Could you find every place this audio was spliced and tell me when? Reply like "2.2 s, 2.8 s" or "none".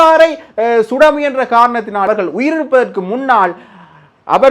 2.1 s